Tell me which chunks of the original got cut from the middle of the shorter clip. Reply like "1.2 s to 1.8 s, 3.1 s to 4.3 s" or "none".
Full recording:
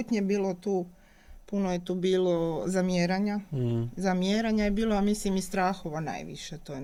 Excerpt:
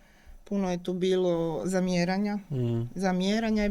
none